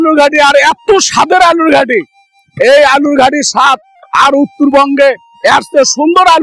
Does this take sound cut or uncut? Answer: uncut